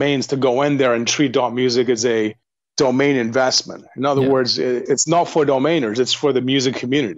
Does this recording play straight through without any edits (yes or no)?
yes